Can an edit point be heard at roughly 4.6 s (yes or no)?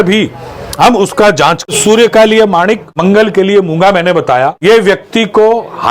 yes